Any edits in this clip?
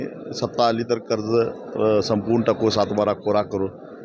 no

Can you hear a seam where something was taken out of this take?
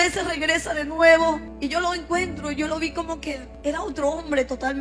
yes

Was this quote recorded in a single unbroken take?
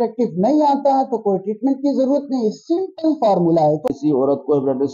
no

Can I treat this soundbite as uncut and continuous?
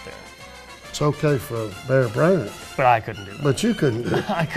yes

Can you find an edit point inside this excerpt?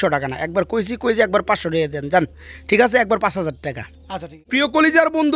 no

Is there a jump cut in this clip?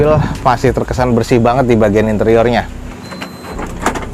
no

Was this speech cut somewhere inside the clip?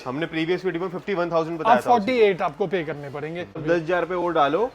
yes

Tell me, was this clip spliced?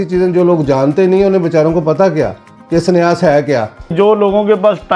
yes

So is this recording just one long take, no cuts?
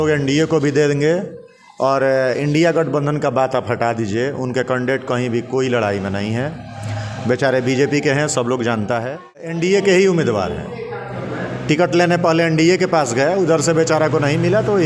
no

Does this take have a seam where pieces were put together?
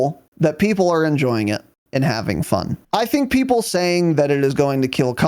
yes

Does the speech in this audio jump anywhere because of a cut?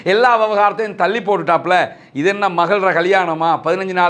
no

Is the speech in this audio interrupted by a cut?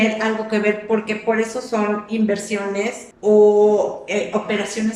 yes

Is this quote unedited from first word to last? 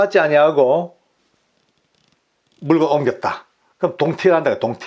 yes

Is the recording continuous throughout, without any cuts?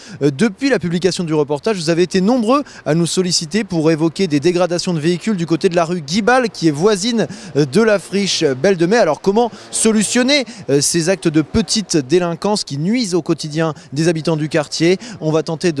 no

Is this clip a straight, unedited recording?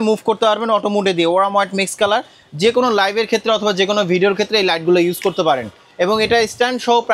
yes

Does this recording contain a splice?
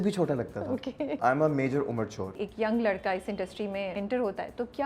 yes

